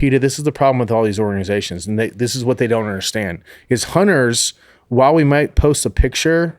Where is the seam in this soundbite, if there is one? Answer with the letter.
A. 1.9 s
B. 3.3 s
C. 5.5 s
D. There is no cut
C